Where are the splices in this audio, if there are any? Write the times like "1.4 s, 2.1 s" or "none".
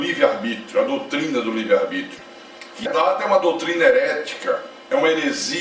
2.9 s